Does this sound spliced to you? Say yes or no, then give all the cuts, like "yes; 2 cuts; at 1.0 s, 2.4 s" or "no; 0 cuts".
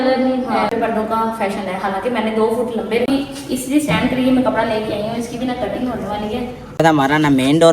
yes; 3 cuts; at 0.7 s, 3.1 s, 6.8 s